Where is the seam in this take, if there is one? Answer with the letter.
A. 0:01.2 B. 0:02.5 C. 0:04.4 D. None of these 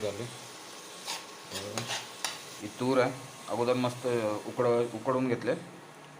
B